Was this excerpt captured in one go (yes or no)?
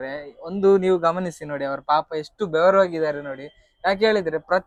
yes